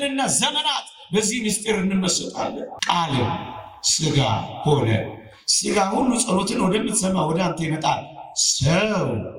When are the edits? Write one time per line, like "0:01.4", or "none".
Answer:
0:02.7